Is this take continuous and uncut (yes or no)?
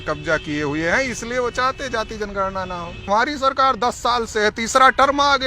no